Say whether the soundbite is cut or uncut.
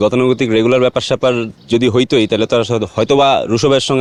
uncut